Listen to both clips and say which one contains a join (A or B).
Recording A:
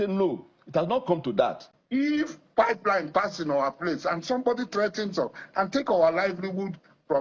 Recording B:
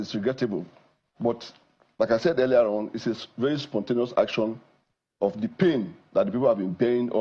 A